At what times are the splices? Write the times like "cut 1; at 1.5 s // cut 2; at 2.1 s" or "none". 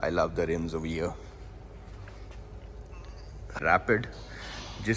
cut 1; at 3.6 s